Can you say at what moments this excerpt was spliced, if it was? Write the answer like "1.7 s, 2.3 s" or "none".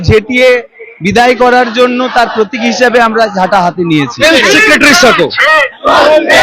4.1 s